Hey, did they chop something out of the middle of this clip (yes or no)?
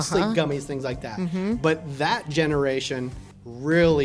no